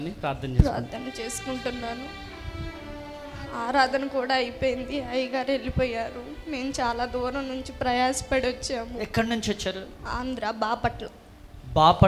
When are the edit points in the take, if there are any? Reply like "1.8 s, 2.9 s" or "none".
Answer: none